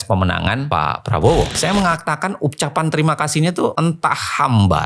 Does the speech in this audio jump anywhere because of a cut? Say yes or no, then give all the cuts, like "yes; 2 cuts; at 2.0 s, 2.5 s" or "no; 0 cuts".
yes; 1 cut; at 1.5 s